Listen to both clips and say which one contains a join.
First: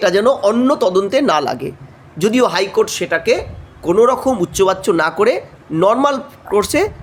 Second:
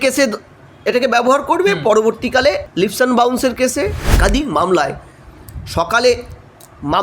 second; 2 cuts; at 2.7 s, 4.0 s

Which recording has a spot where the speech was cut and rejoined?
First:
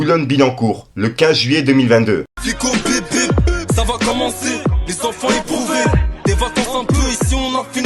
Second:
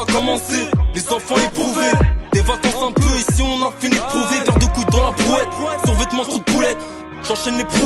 first; 1 cut; at 2.3 s

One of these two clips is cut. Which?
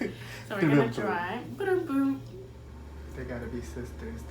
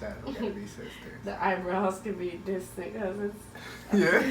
first; 1 cut; at 2.6 s

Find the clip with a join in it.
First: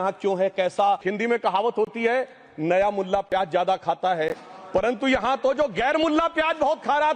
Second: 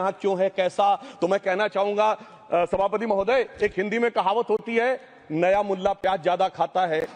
first; 1 cut; at 1.1 s

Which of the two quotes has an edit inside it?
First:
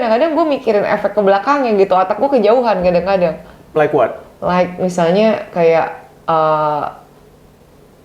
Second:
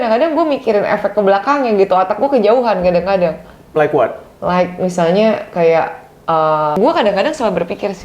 second; 1 cut; at 6.8 s

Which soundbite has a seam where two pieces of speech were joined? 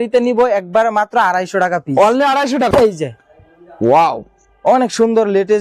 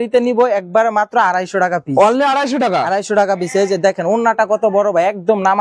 first; 1 cut; at 2.7 s

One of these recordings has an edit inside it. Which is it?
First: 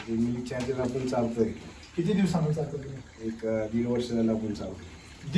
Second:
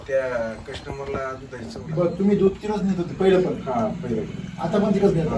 second; 1 cut; at 1.8 s

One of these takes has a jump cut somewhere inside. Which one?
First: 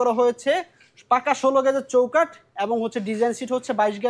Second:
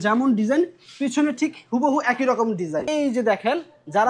second; 1 cut; at 2.9 s

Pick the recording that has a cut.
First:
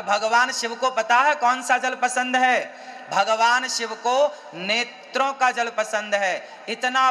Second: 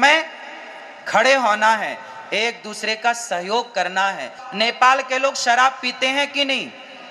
second; 1 cut; at 4.4 s

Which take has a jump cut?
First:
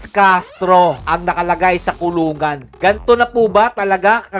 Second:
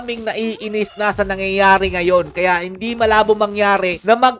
first; 2 cuts; at 1.0 s, 2.7 s

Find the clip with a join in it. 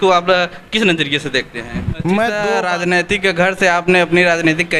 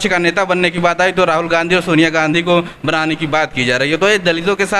first; 1 cut; at 2.5 s

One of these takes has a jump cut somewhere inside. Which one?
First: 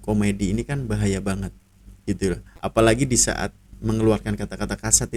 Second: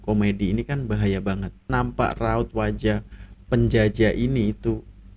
second; 1 cut; at 1.7 s

